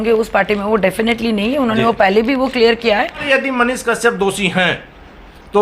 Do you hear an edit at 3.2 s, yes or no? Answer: yes